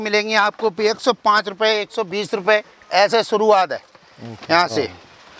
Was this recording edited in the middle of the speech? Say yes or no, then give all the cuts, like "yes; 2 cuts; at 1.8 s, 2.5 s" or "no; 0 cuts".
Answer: no; 0 cuts